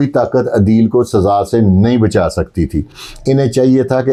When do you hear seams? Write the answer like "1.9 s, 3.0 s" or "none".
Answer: none